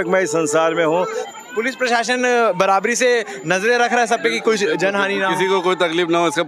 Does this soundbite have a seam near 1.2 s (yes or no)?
yes